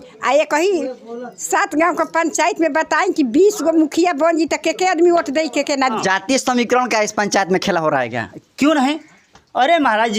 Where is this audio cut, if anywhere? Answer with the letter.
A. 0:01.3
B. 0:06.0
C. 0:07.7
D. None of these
B